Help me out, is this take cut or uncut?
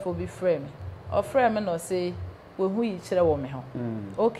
uncut